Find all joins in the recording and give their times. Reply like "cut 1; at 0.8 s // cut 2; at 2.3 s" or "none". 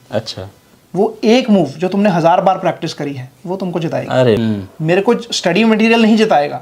cut 1; at 4.4 s